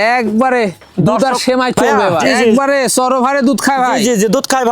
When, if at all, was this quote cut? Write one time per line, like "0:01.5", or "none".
0:02.4